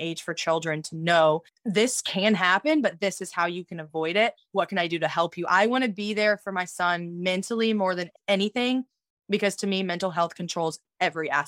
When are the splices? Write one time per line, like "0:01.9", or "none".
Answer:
0:01.5
0:08.1